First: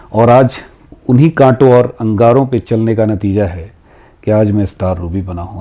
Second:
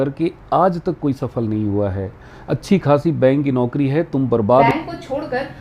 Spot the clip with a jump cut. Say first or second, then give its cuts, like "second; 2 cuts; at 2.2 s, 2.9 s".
second; 1 cut; at 4.7 s